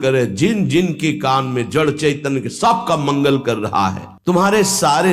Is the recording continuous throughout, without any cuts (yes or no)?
no